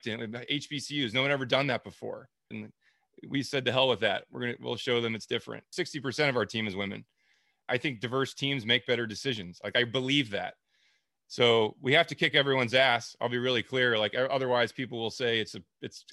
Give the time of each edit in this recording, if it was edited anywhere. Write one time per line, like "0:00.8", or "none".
0:02.5
0:05.7
0:07.6